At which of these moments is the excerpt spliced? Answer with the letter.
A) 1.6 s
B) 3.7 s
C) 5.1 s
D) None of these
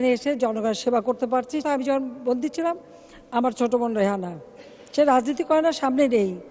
A